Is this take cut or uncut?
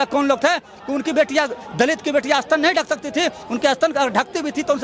uncut